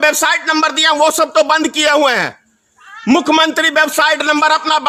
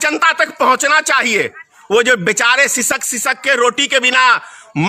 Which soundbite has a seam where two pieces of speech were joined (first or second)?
second